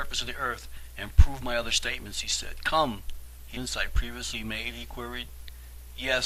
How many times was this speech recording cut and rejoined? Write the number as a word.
zero